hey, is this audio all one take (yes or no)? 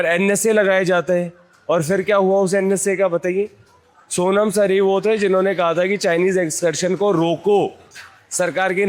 yes